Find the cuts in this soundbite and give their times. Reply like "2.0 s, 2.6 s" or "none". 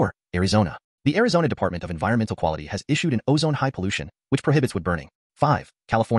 5.1 s